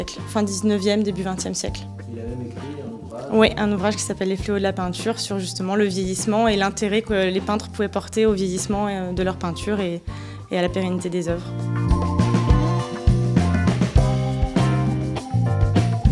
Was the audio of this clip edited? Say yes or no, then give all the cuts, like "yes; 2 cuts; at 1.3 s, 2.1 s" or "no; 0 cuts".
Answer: yes; 1 cut; at 15.2 s